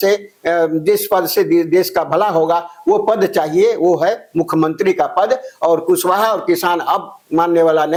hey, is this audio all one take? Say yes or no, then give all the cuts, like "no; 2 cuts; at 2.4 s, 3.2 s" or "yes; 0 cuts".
yes; 0 cuts